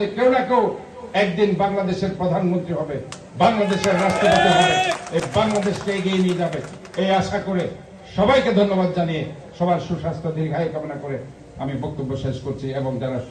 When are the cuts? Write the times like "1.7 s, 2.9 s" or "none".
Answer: none